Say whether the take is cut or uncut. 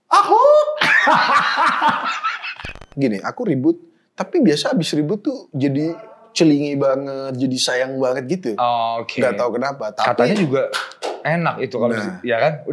cut